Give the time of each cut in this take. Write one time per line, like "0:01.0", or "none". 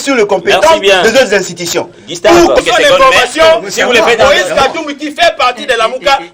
0:02.6